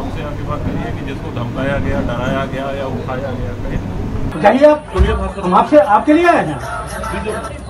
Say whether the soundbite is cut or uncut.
cut